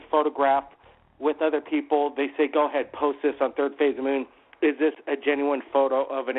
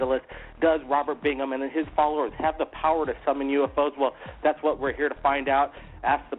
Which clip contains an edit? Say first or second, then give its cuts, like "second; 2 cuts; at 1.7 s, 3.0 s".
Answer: second; 1 cut; at 2.3 s